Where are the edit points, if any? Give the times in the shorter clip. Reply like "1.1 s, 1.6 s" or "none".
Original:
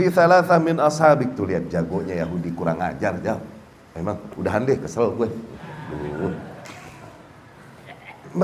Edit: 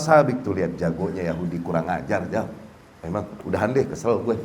none